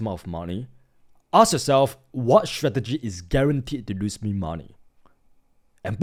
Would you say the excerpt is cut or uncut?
uncut